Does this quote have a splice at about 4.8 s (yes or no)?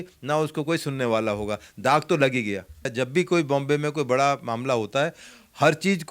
no